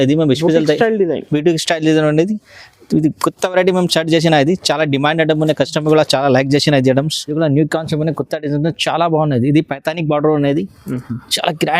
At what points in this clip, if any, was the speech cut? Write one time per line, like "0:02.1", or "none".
0:07.2